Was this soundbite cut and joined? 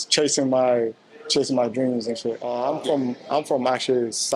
yes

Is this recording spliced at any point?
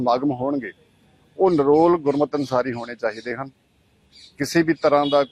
no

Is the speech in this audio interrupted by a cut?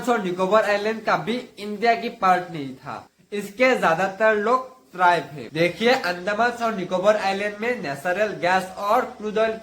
yes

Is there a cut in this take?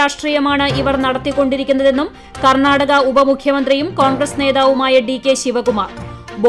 no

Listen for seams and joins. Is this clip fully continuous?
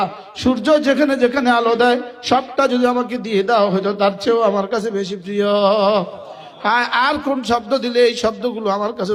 yes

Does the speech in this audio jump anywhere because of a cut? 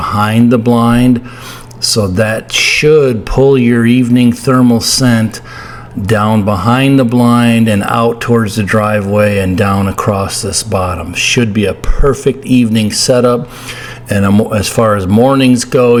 no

